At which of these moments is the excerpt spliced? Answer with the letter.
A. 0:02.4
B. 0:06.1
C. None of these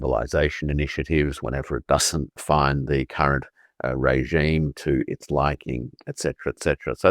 A